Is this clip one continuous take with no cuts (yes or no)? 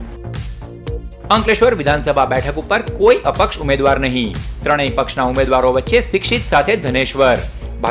yes